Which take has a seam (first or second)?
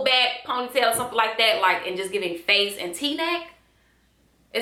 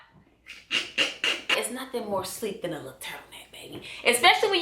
second